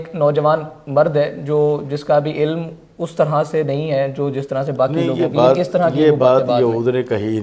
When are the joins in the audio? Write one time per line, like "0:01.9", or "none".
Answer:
none